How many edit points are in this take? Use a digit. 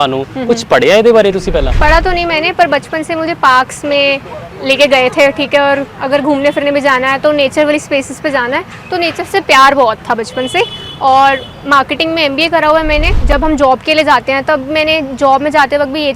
2